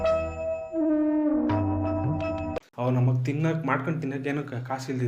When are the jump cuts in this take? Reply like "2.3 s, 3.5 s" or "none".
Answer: 2.7 s